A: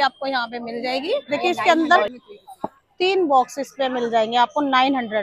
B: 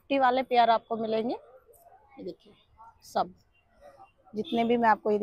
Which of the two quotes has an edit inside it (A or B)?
A